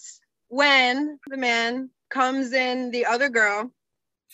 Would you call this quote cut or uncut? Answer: cut